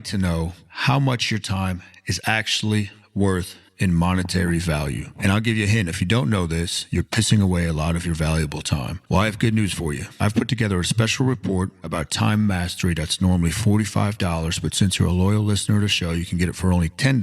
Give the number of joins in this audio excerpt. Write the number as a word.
one